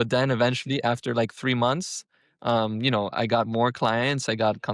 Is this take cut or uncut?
uncut